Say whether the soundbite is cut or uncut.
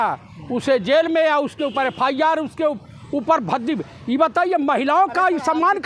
uncut